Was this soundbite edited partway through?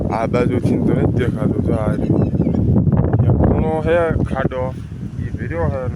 no; 0 cuts

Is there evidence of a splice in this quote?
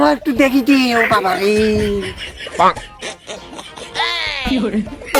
no; 0 cuts

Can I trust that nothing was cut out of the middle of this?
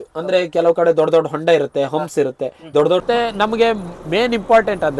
no; 1 cut; at 3.0 s

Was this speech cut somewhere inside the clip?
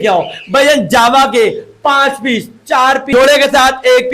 yes; 1 cut; at 3.1 s

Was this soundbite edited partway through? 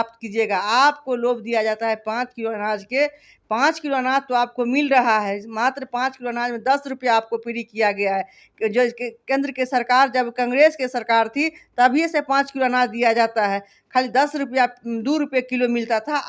no; 0 cuts

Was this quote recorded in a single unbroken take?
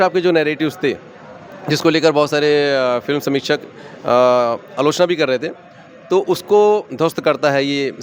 yes; 0 cuts

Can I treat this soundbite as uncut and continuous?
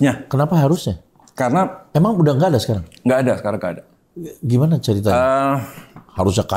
yes; 0 cuts

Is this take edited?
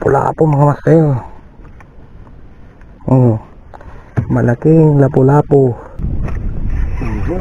yes; 1 cut; at 6.0 s

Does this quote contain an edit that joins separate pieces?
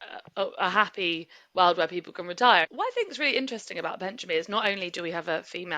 yes; 1 cut; at 2.7 s

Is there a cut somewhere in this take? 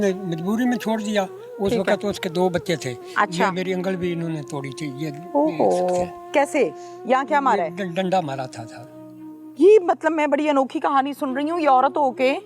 yes; 1 cut; at 3.0 s

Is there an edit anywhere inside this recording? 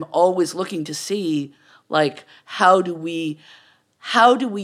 no; 0 cuts

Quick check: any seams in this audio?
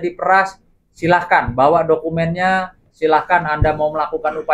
no; 0 cuts

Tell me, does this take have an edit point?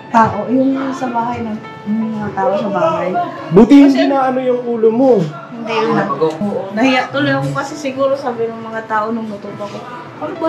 yes; 1 cut; at 6.4 s

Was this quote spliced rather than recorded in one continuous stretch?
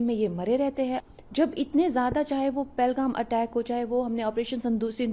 yes; 1 cut; at 1.0 s

